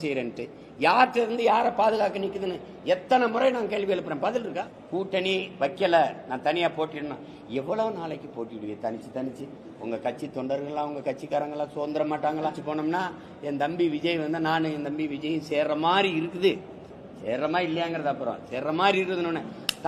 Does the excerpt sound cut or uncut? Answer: cut